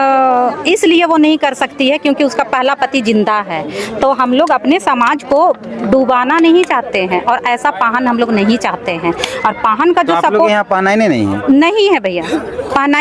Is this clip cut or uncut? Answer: uncut